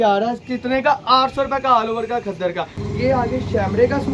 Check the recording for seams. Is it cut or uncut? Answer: cut